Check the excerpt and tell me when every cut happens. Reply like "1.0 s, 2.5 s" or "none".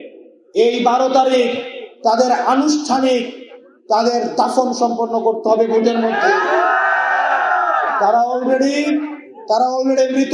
none